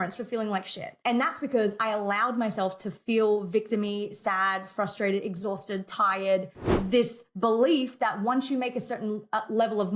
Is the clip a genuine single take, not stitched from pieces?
no; 2 cuts; at 0.9 s, 6.6 s

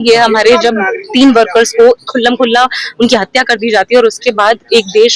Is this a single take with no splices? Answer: yes; 0 cuts

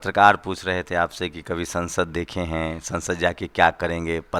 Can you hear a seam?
no; 0 cuts

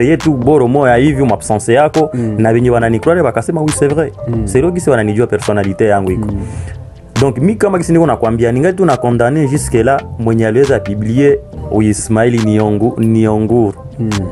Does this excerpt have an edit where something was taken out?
yes; 1 cut; at 11.5 s

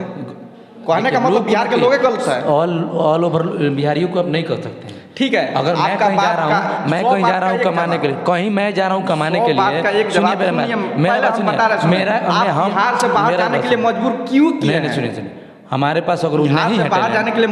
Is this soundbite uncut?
yes; 0 cuts

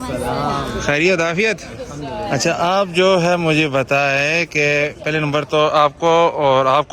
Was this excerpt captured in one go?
yes; 0 cuts

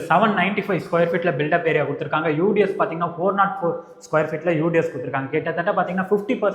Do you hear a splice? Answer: no; 0 cuts

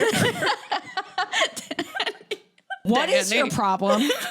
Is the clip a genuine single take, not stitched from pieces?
no; 1 cut; at 2.8 s

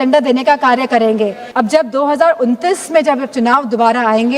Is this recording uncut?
no; 1 cut; at 1.4 s

